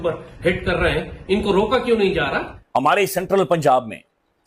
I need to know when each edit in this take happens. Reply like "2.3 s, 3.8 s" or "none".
2.5 s